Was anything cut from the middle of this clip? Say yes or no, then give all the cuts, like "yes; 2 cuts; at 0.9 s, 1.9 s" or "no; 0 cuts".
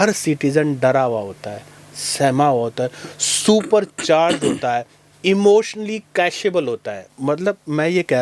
yes; 1 cut; at 7.1 s